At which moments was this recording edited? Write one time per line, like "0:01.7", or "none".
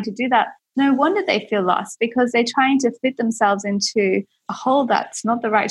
none